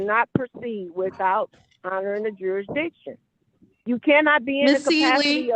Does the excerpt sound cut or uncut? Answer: uncut